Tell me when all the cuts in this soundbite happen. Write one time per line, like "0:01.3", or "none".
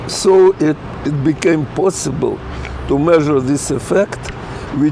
0:00.9

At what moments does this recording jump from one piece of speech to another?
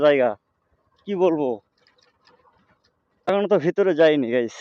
0:03.3

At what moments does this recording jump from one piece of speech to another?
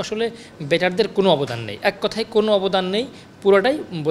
none

